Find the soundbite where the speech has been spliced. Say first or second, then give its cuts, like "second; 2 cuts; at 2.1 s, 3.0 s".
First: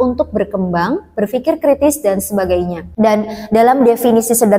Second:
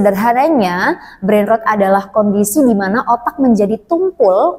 first; 1 cut; at 2.8 s